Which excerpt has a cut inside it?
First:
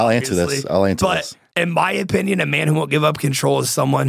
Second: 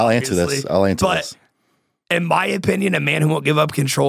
first; 1 cut; at 1.4 s

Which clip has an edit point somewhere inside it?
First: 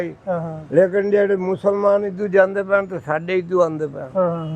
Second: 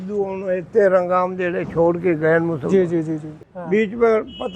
second; 1 cut; at 3.4 s

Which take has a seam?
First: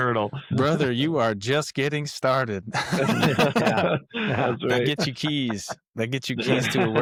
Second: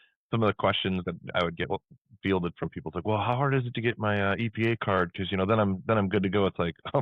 second; 1 cut; at 1.0 s

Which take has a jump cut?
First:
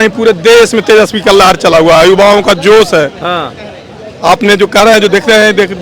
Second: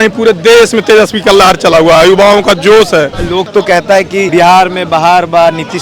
second; 2 cuts; at 3.2 s, 4.3 s

